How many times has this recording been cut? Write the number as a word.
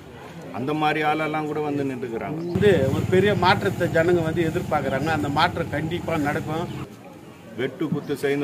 two